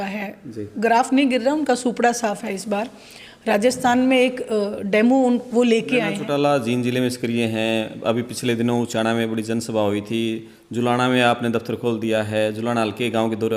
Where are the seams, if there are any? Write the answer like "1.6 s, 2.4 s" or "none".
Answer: 6.2 s